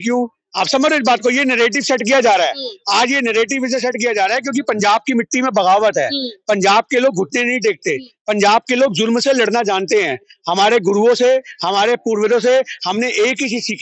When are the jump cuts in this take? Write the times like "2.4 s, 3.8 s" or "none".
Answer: none

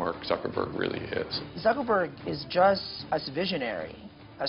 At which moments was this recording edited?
1.4 s, 2.9 s

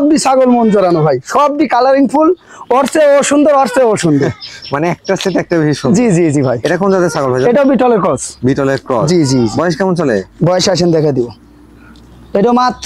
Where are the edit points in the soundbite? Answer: none

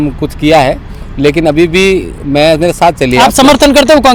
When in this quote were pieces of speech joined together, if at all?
none

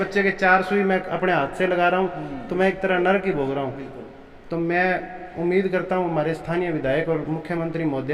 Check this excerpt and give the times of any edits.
none

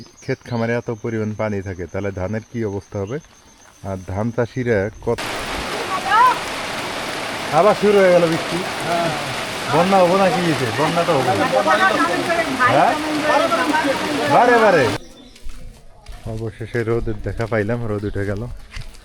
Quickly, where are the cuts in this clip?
5.2 s, 14.9 s

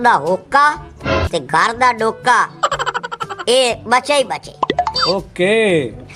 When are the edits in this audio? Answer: none

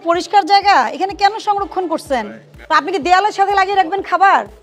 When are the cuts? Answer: 2.5 s

